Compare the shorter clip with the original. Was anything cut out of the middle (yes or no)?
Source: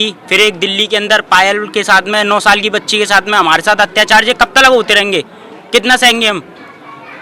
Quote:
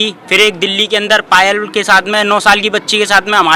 no